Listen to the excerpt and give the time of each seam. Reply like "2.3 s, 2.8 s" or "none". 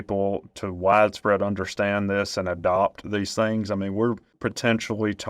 4.4 s